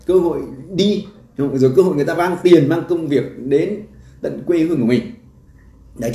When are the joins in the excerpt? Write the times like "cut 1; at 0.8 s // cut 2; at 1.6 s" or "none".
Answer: none

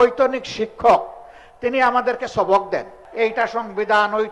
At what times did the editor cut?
cut 1; at 3.0 s

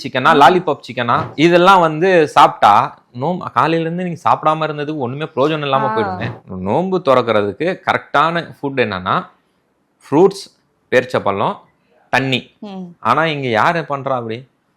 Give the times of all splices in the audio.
cut 1; at 12.9 s

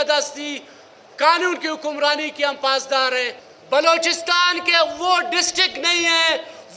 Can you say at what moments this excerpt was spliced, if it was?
cut 1; at 3.4 s

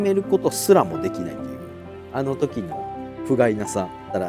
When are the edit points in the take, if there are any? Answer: none

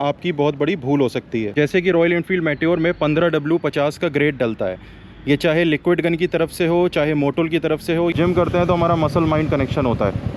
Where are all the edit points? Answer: cut 1; at 1.5 s // cut 2; at 8.1 s

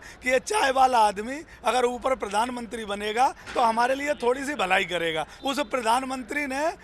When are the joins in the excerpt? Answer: cut 1; at 5.3 s

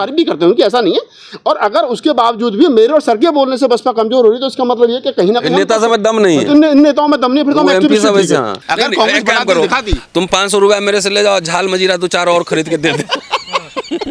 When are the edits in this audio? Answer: cut 1; at 8.6 s

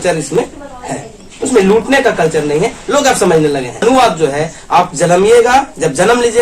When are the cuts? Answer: cut 1; at 3.8 s

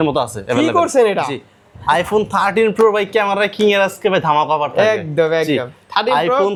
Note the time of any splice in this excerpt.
none

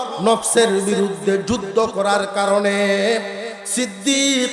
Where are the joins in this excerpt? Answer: none

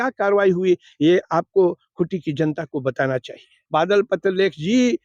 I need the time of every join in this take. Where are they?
cut 1; at 3.6 s

